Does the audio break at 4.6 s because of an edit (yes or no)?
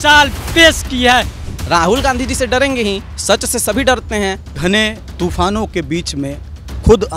yes